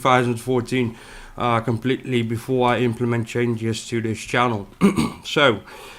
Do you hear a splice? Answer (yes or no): yes